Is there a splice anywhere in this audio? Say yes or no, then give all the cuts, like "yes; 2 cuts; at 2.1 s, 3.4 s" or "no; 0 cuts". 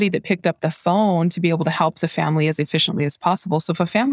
no; 0 cuts